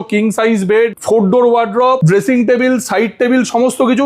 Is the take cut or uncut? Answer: cut